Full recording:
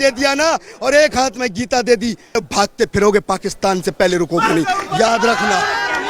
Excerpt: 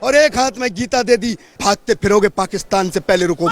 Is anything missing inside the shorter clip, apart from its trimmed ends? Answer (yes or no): yes